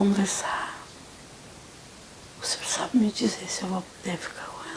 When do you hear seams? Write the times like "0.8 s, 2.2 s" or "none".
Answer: 2.1 s